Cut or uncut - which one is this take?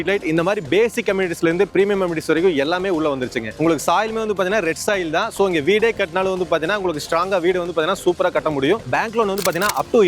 cut